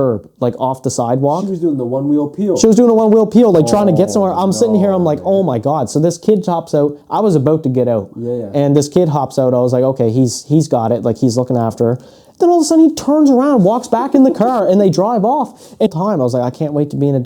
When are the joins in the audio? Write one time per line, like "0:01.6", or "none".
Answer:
0:15.9